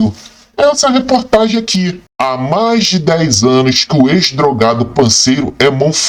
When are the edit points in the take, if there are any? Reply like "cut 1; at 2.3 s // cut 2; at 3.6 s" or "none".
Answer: cut 1; at 1.9 s